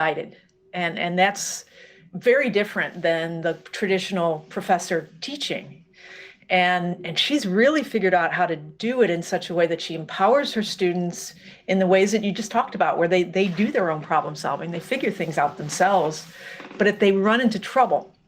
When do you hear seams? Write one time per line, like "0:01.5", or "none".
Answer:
none